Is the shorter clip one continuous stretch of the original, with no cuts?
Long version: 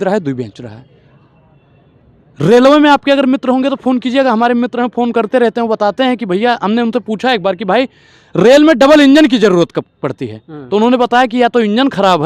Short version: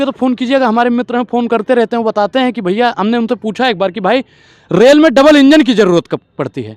yes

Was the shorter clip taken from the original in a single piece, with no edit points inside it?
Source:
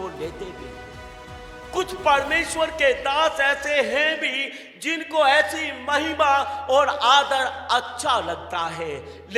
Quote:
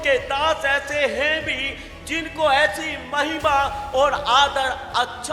yes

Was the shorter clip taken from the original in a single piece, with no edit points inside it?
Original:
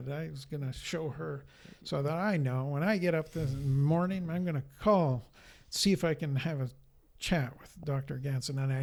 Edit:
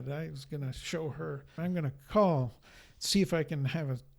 no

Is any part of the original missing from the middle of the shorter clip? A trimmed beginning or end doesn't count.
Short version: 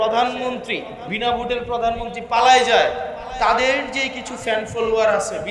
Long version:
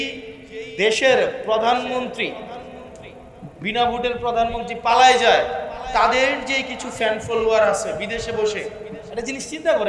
yes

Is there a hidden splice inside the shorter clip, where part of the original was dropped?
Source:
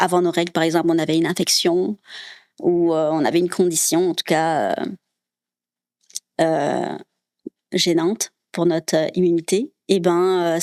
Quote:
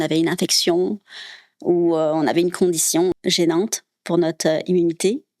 yes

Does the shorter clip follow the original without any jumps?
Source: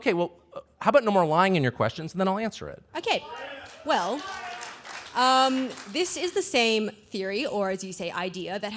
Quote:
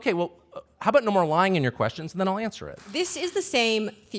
no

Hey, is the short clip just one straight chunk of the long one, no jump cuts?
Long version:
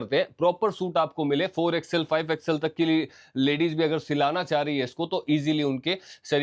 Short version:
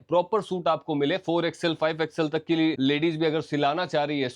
no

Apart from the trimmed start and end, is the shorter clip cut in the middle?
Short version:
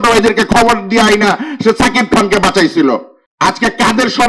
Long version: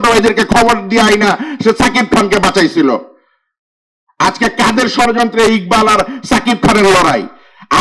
yes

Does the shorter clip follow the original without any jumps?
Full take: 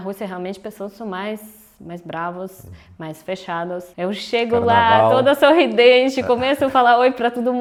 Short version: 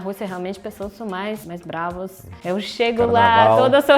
no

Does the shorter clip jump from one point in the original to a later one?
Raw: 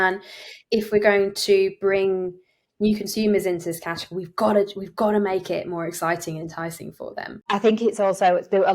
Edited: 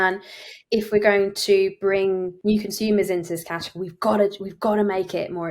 yes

